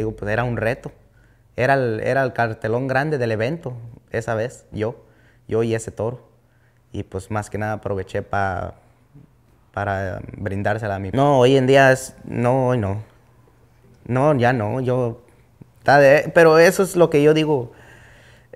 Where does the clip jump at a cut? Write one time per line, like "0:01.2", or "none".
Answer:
0:11.1

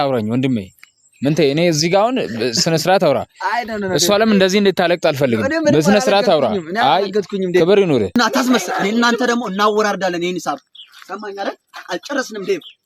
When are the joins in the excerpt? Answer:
0:08.2

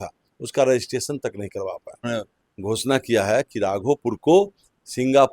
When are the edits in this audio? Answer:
0:02.1

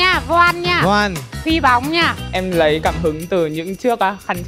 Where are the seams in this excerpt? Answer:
0:02.3

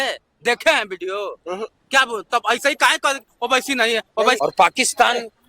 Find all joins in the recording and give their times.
0:04.4

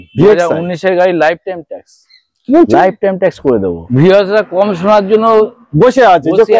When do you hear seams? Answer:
0:03.8

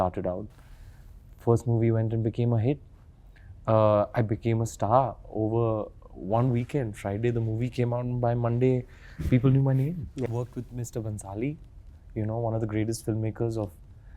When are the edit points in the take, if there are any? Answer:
0:10.3

